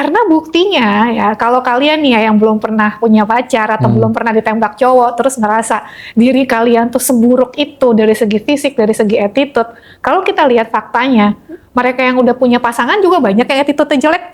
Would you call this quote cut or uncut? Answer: uncut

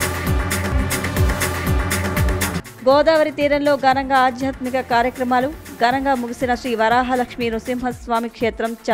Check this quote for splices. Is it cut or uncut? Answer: cut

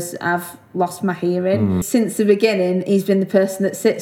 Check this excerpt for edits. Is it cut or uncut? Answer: cut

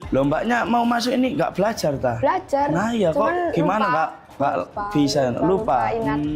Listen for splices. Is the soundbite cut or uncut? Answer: cut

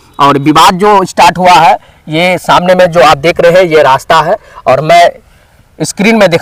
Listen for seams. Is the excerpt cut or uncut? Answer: uncut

